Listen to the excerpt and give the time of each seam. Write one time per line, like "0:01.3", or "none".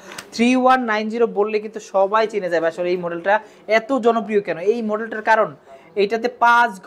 none